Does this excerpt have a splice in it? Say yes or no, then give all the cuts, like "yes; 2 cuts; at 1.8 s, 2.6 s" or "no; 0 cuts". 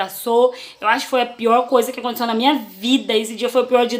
no; 0 cuts